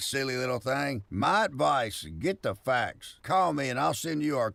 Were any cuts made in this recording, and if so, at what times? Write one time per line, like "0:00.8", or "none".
none